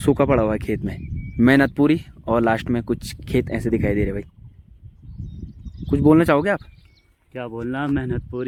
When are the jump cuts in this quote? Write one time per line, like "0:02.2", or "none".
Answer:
none